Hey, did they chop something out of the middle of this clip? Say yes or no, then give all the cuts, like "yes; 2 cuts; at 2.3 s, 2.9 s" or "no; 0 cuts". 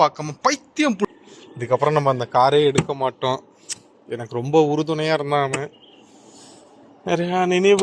yes; 1 cut; at 1.1 s